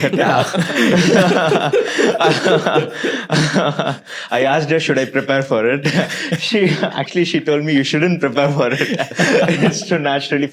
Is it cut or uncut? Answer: uncut